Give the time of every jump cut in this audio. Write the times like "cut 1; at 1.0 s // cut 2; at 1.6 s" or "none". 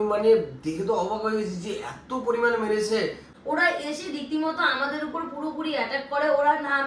cut 1; at 3.3 s

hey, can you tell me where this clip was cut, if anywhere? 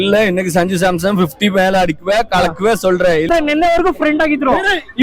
cut 1; at 3.3 s

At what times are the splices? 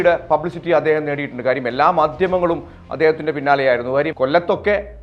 cut 1; at 4.1 s

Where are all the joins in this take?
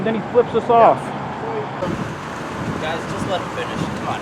cut 1; at 1.8 s

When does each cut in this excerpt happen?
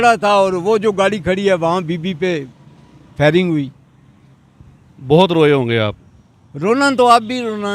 none

